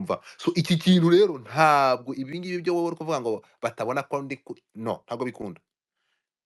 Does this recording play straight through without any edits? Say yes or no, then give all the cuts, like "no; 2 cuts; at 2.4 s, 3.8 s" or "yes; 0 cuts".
yes; 0 cuts